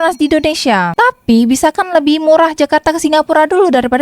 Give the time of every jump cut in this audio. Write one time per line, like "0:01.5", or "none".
0:00.9